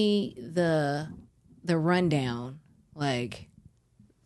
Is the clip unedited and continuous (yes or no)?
yes